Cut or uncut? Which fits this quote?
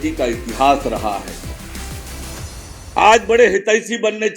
uncut